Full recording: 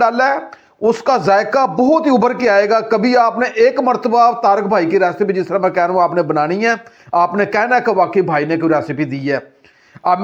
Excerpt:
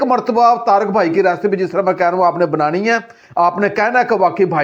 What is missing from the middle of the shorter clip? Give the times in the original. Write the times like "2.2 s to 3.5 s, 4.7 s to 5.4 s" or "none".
none